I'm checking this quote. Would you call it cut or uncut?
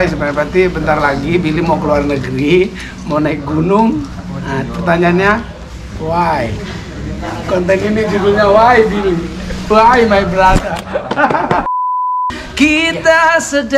cut